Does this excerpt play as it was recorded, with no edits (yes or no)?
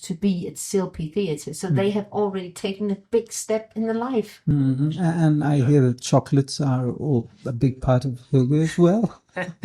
no